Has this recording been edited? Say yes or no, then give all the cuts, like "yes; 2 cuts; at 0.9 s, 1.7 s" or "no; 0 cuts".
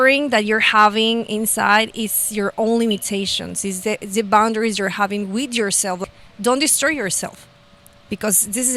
yes; 1 cut; at 6.0 s